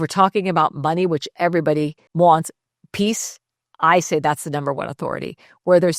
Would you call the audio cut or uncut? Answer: cut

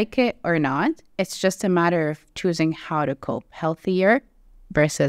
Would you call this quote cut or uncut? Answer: uncut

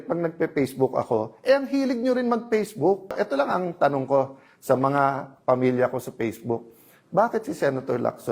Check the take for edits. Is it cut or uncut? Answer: cut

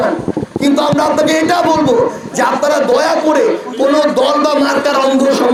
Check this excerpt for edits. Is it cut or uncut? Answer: uncut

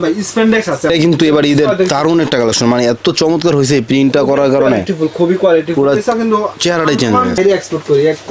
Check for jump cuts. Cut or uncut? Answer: cut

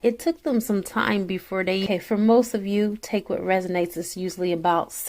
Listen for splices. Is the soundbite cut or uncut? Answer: cut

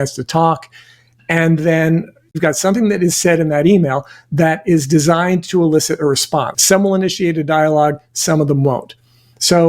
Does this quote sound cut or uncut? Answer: cut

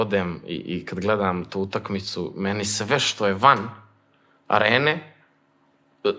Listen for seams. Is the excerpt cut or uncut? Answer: uncut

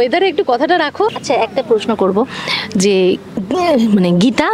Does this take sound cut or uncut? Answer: cut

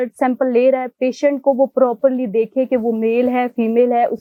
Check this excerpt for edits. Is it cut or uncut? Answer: uncut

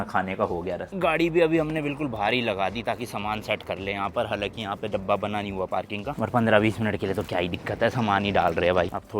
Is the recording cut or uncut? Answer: uncut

